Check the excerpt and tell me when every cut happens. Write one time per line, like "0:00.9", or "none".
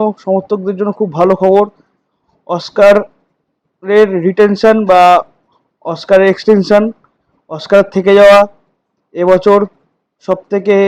none